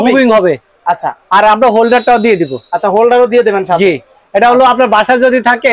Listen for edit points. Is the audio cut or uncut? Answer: uncut